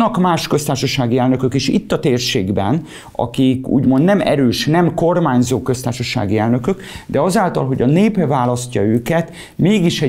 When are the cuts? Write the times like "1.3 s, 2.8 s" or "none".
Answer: none